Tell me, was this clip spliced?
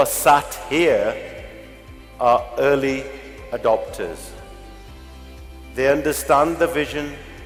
no; 0 cuts

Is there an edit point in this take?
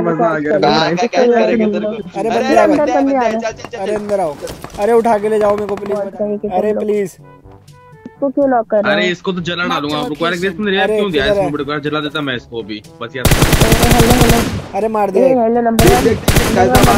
no; 0 cuts

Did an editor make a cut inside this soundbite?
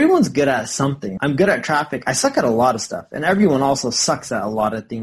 yes; 1 cut; at 1.1 s

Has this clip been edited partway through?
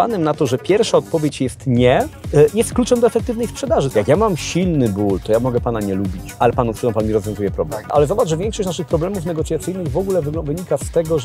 yes; 4 cuts; at 2.2 s, 3.9 s, 6.2 s, 7.9 s

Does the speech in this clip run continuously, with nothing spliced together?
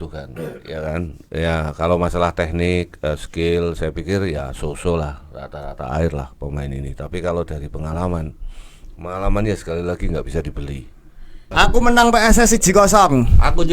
no; 1 cut; at 11.5 s

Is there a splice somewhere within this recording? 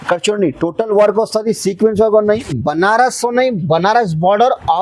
yes; 1 cut; at 2.5 s

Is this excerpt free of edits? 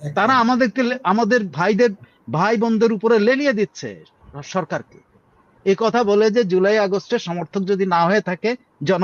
yes; 0 cuts

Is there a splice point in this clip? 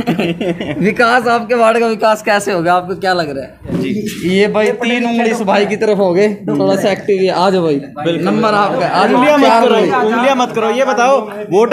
yes; 1 cut; at 3.7 s

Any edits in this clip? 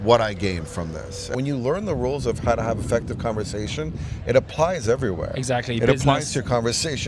yes; 1 cut; at 1.3 s

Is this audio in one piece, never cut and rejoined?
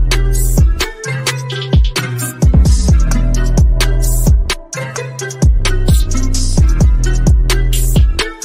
no; 1 cut; at 5.2 s

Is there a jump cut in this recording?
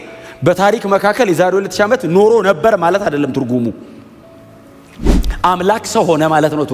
no; 0 cuts

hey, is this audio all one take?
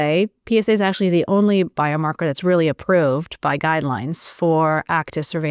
yes; 0 cuts

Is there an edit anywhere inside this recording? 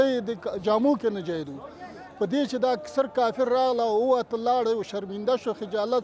no; 0 cuts

